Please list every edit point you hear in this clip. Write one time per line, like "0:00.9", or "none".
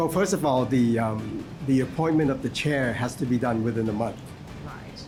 none